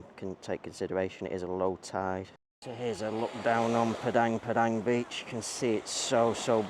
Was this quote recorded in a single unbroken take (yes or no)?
no